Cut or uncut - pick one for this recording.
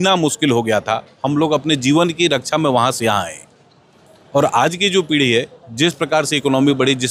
uncut